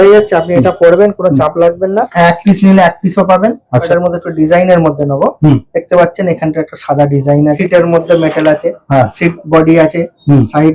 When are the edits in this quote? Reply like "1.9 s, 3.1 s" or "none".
2.1 s, 3.9 s, 7.6 s

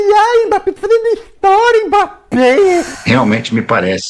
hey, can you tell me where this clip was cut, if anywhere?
2.9 s

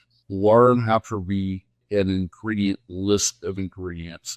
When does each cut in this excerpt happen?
1.8 s

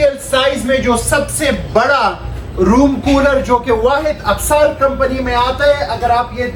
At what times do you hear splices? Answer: none

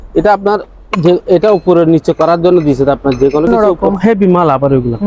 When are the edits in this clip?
3.5 s

